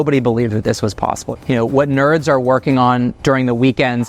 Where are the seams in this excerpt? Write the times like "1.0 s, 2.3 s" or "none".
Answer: 1.3 s